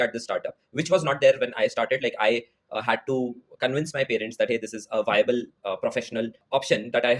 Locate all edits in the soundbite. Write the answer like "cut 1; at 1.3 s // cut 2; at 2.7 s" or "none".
none